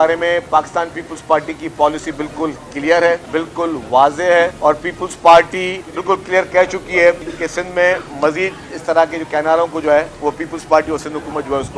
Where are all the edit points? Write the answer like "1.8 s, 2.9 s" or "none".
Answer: 3.2 s, 4.5 s, 5.9 s, 7.3 s, 10.1 s